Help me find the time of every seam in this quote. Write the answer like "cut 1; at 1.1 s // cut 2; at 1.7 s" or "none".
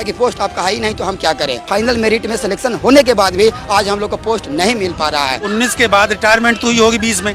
cut 1; at 1.6 s // cut 2; at 5.5 s